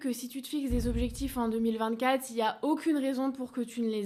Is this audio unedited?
yes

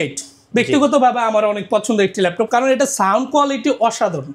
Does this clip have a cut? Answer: no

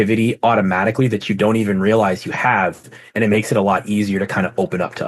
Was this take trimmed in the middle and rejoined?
no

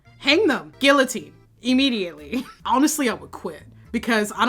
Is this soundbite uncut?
no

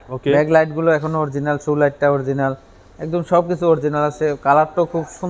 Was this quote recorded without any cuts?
yes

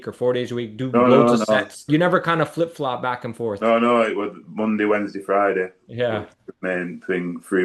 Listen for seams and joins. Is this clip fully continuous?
no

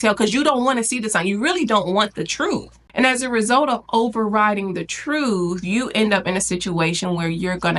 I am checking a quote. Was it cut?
yes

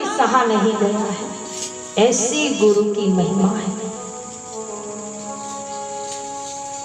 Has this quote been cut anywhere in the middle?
no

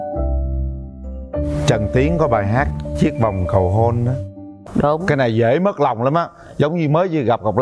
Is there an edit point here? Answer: yes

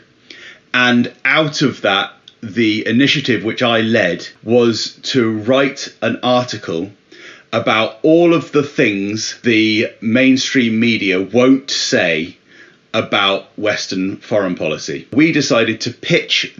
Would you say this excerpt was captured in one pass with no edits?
no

